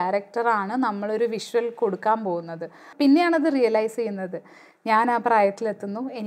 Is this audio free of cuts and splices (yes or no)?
no